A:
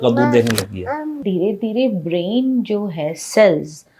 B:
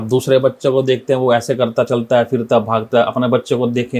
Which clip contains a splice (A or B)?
A